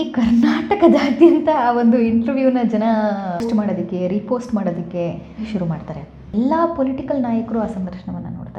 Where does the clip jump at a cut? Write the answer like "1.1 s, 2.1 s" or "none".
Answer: 3.4 s, 6.3 s